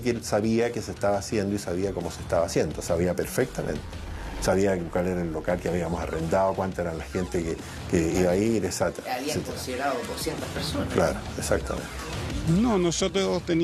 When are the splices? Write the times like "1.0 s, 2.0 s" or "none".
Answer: none